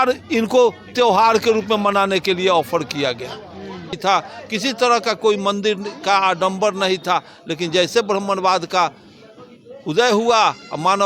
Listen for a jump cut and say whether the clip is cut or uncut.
cut